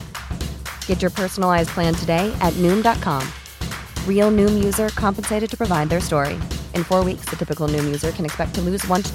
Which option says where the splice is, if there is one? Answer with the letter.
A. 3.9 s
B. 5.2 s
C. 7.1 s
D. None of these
D